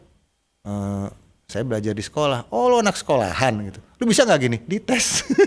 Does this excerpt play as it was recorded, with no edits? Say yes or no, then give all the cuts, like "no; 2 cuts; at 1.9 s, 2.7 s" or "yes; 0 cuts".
yes; 0 cuts